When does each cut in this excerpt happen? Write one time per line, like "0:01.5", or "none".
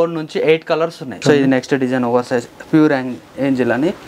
0:01.1